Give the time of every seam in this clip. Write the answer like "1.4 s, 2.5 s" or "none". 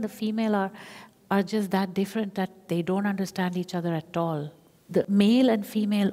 5.0 s

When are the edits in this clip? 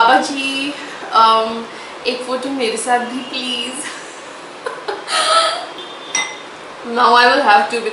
5.7 s

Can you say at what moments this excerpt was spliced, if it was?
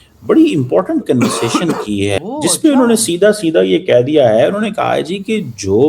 2.2 s

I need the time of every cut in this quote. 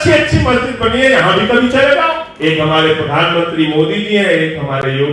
2.3 s

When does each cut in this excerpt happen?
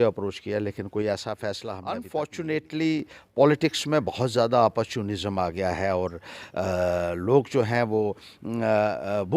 1.9 s

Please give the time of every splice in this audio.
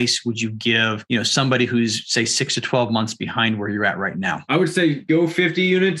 1.0 s, 4.4 s, 5.0 s

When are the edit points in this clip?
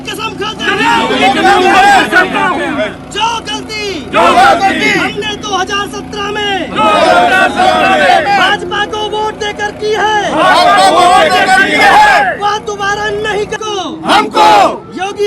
13.6 s

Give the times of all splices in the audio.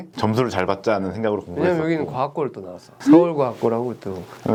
none

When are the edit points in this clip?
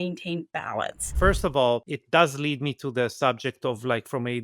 1.0 s, 1.9 s

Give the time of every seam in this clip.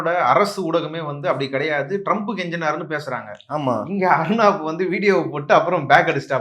none

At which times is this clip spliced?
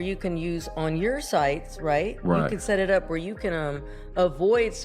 none

